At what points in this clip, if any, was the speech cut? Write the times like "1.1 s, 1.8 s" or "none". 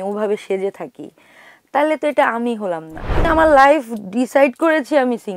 3.2 s